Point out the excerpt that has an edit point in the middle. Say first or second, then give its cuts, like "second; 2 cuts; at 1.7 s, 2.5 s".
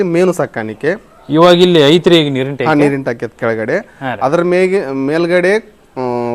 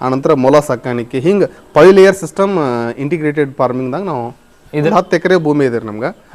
second; 1 cut; at 4.9 s